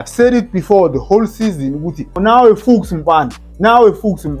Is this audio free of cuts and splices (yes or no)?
no